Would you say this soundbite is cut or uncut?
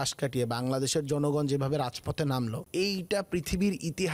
cut